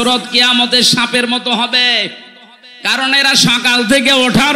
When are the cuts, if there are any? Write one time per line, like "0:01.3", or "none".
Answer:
none

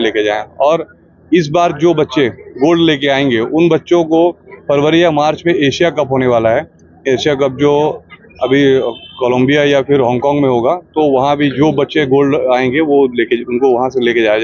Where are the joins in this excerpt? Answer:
none

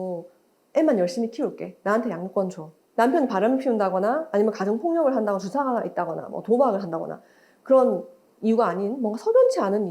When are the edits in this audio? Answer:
0:02.8

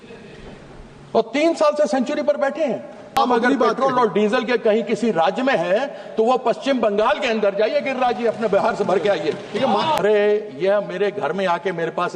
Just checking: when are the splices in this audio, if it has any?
0:03.2
0:10.0

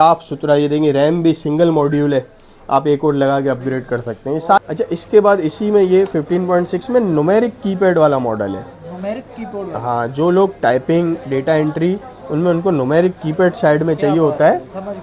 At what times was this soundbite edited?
0:04.6

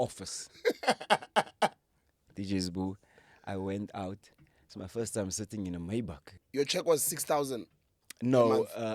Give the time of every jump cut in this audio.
0:06.4

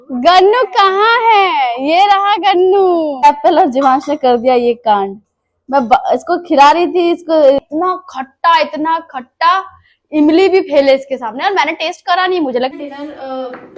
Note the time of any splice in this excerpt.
0:03.2
0:07.6
0:12.7

